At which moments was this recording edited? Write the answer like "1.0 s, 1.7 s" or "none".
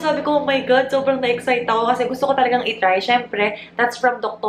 none